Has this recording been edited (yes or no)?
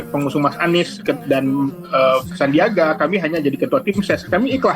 yes